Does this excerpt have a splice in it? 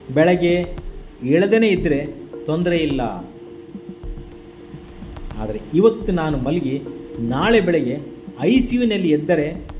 no; 0 cuts

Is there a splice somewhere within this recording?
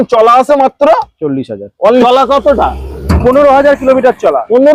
yes; 1 cut; at 2.0 s

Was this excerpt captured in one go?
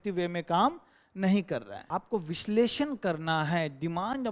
no; 1 cut; at 1.8 s

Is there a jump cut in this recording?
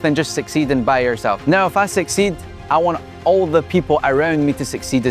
yes; 1 cut; at 1.4 s

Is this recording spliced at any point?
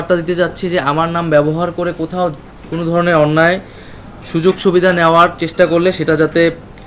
no; 0 cuts

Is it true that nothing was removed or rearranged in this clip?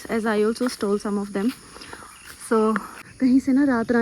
no; 1 cut; at 3.0 s

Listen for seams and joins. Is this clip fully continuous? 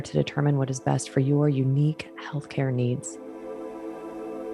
no; 1 cut; at 3.1 s

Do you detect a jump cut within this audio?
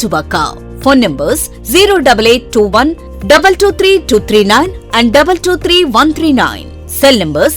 no; 0 cuts

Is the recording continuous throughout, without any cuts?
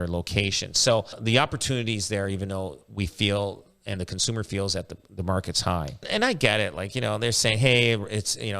no; 2 cuts; at 1.2 s, 6.1 s

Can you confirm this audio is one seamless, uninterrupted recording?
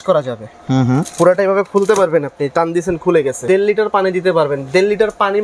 no; 1 cut; at 3.4 s

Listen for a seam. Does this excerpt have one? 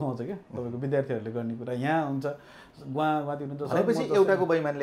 no; 0 cuts

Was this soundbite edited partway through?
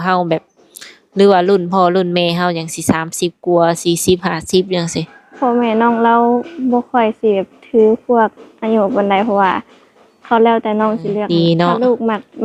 yes; 1 cut; at 11.3 s

